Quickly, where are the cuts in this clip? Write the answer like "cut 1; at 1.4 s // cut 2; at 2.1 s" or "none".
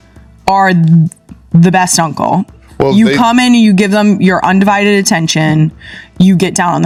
none